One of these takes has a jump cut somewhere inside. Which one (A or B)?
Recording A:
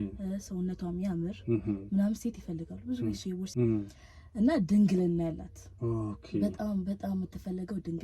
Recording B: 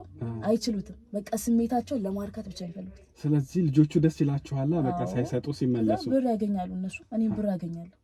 A